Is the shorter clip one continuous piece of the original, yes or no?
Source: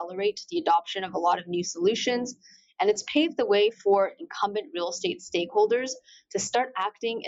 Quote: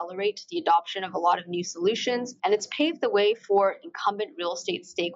no